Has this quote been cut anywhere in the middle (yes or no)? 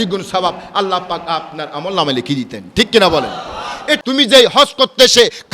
yes